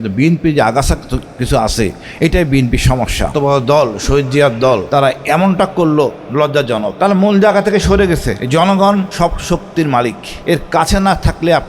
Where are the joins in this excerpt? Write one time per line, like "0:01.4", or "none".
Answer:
0:03.3
0:04.8
0:06.9
0:08.4
0:09.1
0:10.3